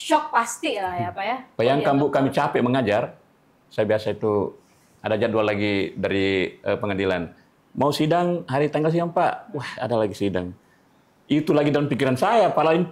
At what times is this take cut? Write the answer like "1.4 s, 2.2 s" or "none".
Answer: none

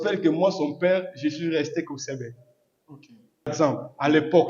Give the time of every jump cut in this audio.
3.5 s

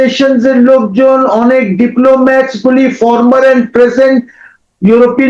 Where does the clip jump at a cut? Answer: none

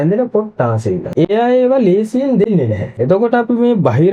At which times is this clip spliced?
1.1 s, 2.9 s

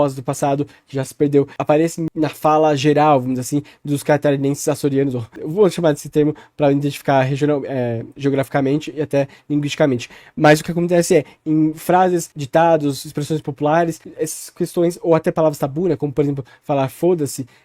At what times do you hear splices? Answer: none

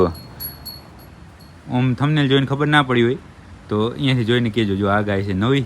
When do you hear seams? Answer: none

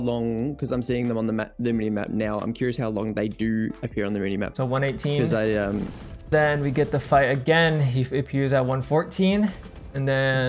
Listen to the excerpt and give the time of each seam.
4.5 s, 6.3 s

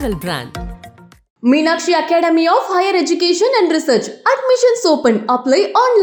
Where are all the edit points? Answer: none

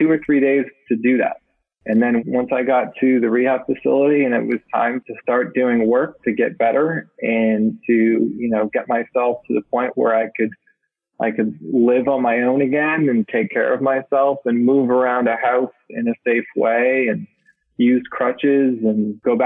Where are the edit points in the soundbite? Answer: 2.2 s, 5.0 s

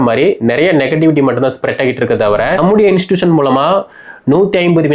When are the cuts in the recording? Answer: 2.6 s

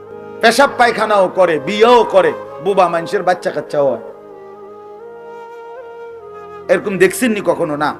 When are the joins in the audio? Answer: none

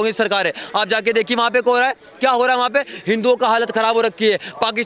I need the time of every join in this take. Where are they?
none

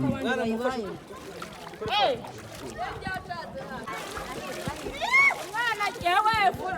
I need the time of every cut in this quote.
3.9 s

